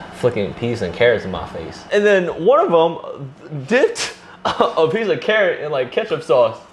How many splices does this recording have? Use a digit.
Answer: 1